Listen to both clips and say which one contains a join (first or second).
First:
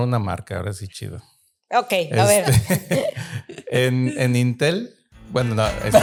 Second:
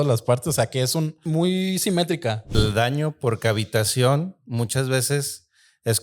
second